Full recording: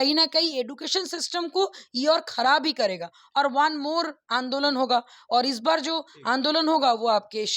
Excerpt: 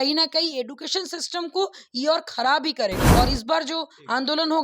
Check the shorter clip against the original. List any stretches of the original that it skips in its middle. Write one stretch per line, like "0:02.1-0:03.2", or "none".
0:03.0-0:05.2